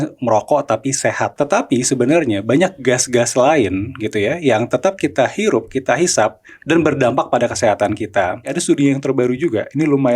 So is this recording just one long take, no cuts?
no; 2 cuts; at 1.3 s, 8.6 s

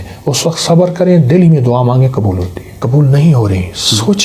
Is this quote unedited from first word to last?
no; 1 cut; at 2.8 s

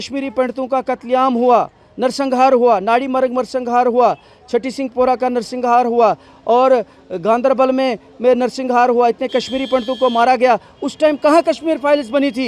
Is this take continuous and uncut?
yes; 0 cuts

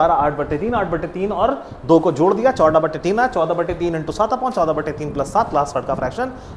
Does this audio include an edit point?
no; 0 cuts

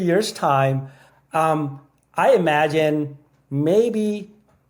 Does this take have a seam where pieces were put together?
no; 0 cuts

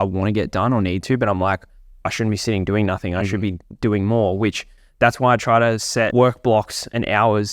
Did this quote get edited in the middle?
yes; 1 cut; at 6.1 s

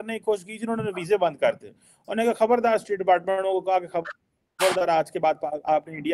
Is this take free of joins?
yes; 0 cuts

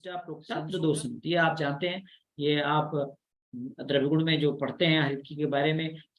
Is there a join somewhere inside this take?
no; 0 cuts

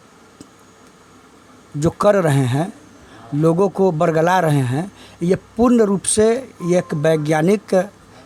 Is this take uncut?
yes; 0 cuts

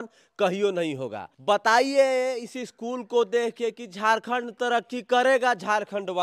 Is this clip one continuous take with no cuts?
yes; 0 cuts

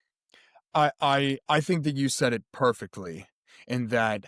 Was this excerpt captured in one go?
yes; 0 cuts

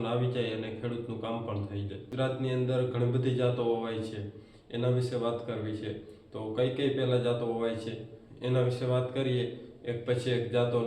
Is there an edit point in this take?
yes; 1 cut; at 2.1 s

